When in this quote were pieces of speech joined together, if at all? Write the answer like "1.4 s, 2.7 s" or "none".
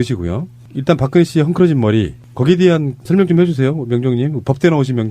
1.9 s